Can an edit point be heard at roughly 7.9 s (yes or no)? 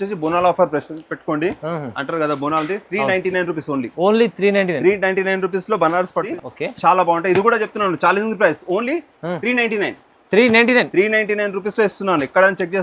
no